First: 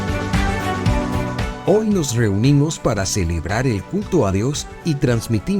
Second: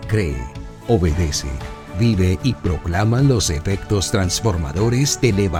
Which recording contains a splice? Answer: first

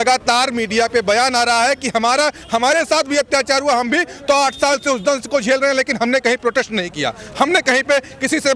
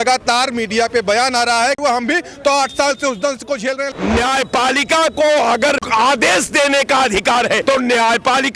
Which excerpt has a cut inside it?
second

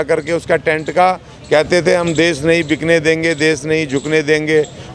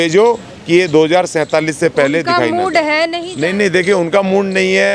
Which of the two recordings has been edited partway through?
second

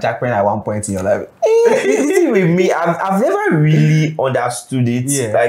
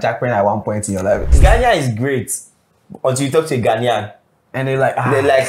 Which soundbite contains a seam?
second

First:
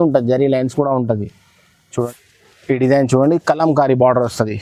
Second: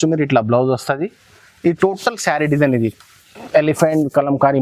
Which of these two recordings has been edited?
first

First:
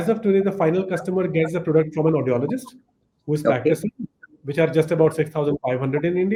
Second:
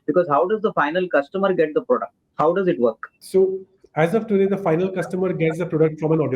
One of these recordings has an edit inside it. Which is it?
second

